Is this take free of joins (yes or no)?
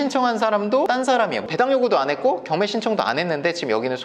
no